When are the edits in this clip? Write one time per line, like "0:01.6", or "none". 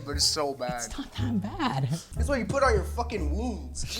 0:02.1